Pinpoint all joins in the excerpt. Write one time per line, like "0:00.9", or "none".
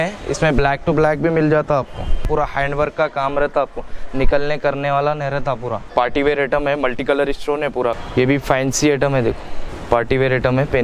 0:02.2
0:05.8
0:08.0